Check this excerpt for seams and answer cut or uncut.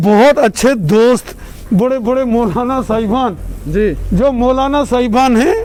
uncut